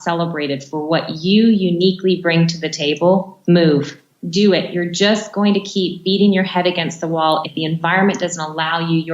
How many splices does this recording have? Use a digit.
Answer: 3